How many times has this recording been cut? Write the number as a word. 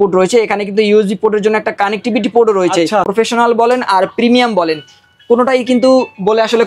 one